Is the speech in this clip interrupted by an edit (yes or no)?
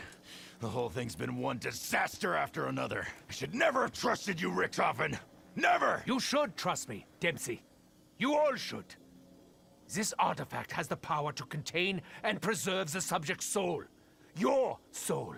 no